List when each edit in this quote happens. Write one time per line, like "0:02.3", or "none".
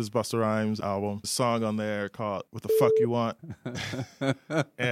0:01.0
0:02.5
0:03.5